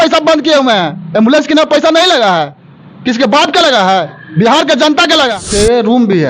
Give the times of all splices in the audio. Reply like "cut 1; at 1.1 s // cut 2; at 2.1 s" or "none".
cut 1; at 5.4 s